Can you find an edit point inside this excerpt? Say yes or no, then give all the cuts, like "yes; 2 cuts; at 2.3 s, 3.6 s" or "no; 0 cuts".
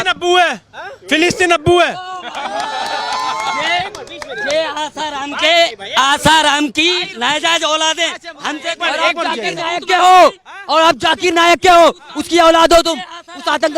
no; 0 cuts